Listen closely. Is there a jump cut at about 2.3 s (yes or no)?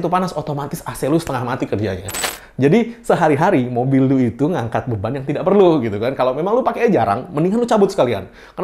yes